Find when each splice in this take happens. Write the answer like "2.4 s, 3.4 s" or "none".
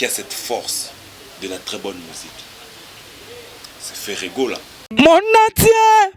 4.7 s